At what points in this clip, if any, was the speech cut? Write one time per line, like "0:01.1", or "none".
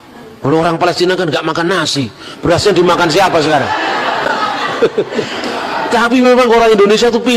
0:04.2